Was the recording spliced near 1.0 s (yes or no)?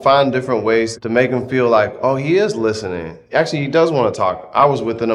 yes